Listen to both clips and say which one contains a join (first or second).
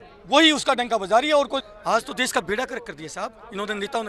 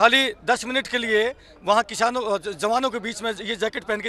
first